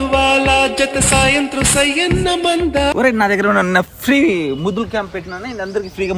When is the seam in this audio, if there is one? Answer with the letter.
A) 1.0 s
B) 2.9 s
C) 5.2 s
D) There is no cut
B